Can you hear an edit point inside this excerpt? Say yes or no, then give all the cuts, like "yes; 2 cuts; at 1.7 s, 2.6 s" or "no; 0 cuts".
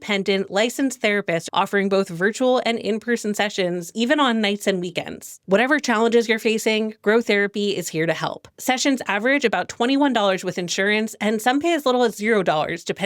yes; 2 cuts; at 1.5 s, 5.3 s